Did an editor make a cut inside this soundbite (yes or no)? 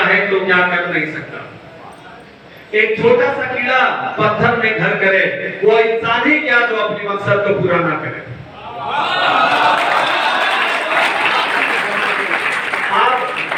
no